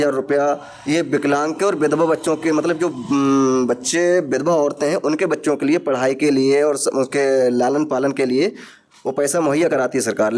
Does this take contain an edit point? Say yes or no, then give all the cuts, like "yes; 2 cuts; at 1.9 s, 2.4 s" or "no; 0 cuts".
no; 0 cuts